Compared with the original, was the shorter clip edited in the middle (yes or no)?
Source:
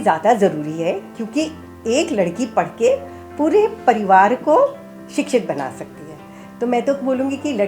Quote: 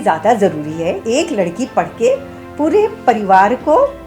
yes